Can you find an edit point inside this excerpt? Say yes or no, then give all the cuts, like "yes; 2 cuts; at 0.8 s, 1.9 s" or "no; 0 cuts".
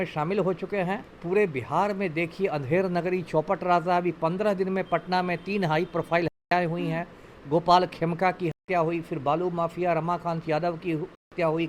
no; 0 cuts